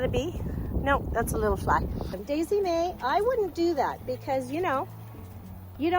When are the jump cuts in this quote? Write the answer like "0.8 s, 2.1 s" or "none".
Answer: 2.1 s